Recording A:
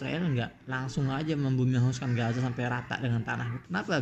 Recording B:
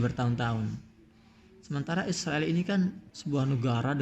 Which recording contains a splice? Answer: B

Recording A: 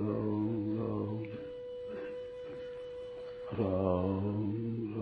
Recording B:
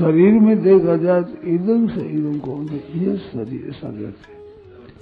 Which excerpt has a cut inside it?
A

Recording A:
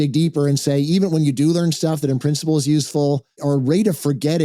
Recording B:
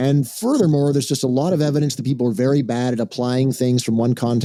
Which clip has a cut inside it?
A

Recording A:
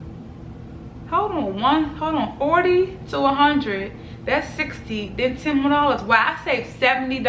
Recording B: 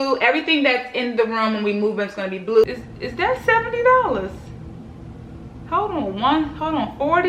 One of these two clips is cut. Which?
B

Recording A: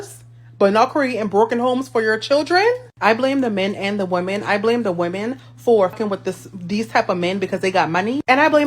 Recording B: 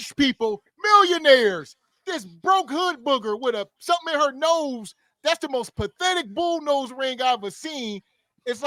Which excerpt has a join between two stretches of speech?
A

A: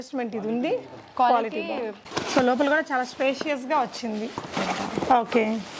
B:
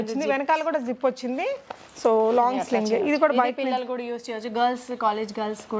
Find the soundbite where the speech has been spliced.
A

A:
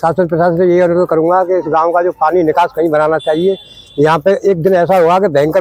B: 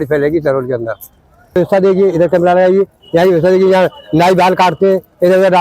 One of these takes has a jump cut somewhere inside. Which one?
B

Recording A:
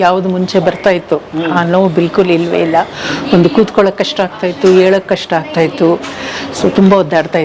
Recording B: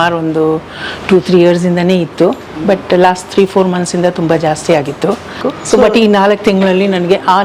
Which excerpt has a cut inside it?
B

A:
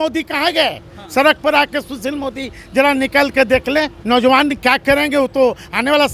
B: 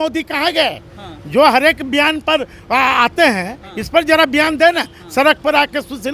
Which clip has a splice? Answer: A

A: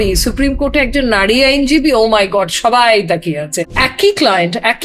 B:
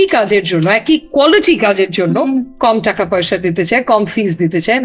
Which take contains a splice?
A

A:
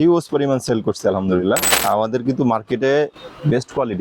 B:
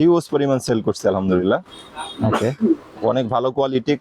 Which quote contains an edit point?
A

